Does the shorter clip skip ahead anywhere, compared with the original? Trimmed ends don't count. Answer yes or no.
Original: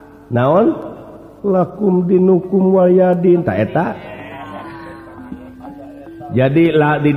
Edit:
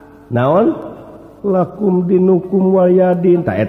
no